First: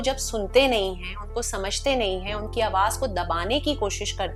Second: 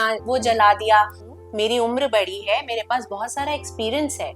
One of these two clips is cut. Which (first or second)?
second